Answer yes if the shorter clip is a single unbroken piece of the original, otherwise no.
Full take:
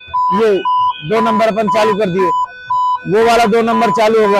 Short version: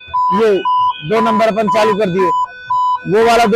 yes